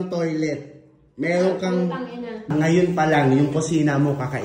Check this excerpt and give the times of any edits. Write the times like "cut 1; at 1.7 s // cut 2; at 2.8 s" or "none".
cut 1; at 2.5 s